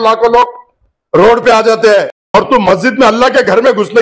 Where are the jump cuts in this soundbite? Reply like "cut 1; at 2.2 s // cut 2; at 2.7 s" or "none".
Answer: cut 1; at 2.3 s